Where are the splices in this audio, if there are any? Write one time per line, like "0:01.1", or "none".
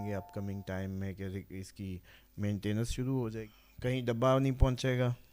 0:03.4